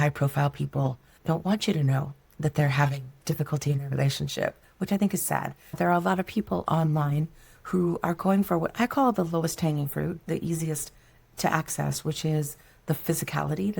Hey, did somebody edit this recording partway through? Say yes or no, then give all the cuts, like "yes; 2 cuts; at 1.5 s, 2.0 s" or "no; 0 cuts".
yes; 2 cuts; at 1.1 s, 5.6 s